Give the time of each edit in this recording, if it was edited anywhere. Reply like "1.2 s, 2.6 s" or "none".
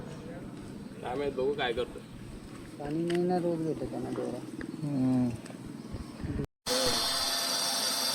6.5 s